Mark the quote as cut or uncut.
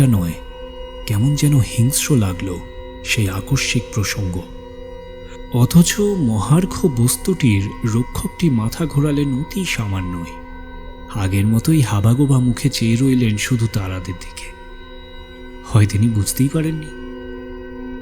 uncut